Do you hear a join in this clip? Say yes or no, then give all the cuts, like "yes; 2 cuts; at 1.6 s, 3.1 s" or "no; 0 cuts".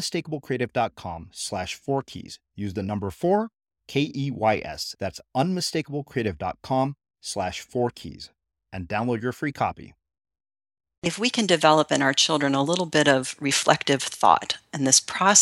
yes; 1 cut; at 11.0 s